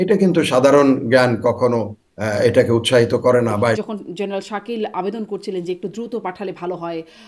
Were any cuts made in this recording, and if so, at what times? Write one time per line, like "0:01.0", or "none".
0:03.8

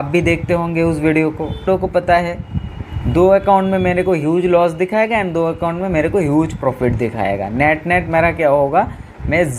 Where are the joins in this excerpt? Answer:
0:01.6

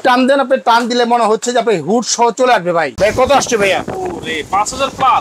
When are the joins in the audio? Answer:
0:02.9

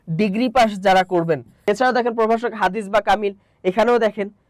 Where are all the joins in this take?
0:01.5

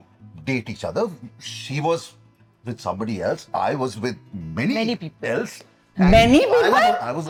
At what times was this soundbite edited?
none

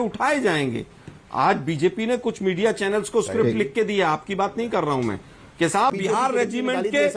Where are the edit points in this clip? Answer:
0:05.9

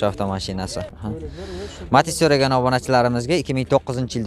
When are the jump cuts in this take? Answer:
0:00.9

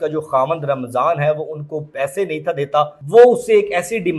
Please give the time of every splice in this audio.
0:03.0

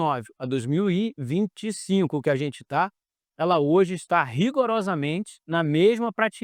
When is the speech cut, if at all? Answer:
none

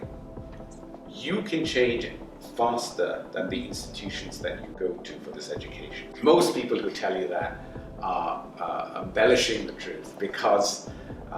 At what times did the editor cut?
0:04.7
0:06.1

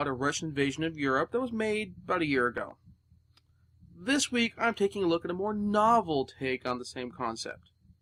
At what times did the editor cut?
none

